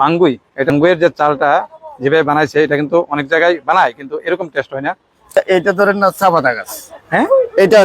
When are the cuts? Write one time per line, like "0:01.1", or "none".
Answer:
0:00.7
0:05.3